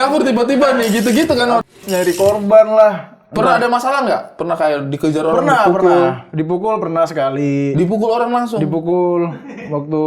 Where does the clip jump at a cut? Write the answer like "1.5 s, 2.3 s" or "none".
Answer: 1.7 s

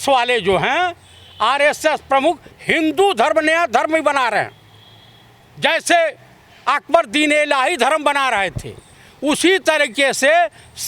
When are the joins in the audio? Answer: none

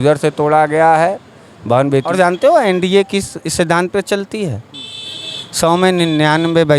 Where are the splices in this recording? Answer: 2.1 s

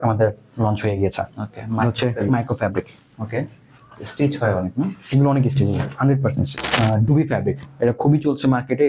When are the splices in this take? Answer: 6.6 s

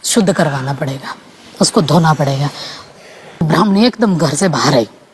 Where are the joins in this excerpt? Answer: 3.4 s

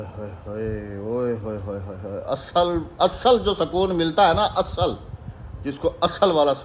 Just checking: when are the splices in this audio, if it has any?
none

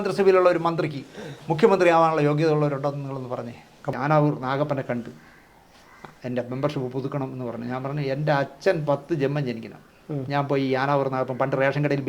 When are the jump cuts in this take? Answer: 3.9 s

